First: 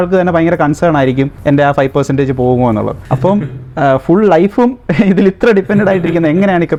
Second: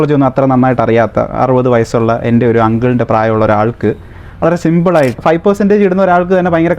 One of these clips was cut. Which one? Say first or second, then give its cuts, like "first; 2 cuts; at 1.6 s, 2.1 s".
second; 1 cut; at 5.2 s